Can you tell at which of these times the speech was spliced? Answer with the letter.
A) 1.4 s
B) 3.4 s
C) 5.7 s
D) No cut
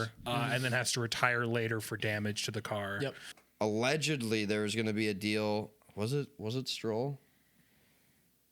B